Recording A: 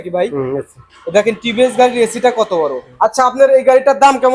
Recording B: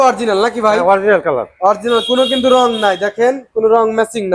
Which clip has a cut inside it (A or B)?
A